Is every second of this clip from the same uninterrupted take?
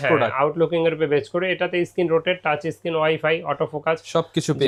yes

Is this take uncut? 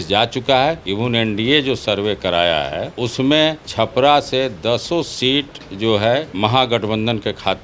no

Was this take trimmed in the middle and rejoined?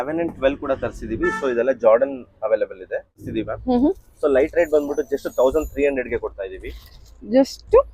yes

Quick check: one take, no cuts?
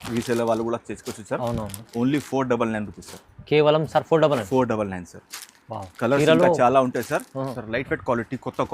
no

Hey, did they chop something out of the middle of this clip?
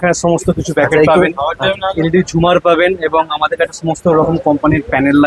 no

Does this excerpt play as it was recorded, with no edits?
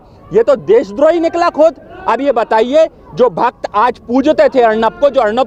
yes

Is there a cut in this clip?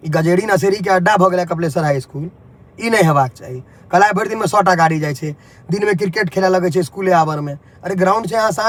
no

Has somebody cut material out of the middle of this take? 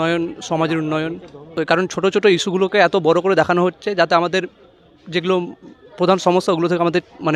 yes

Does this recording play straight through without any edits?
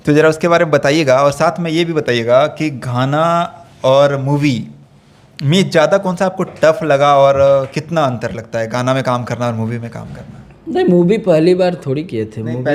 yes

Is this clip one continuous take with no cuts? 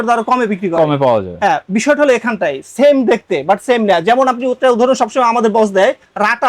yes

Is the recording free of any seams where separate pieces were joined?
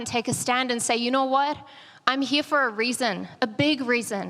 yes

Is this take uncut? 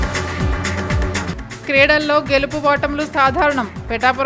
no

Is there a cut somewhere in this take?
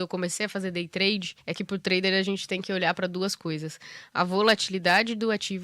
yes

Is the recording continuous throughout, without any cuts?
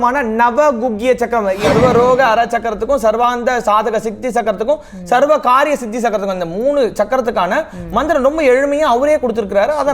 no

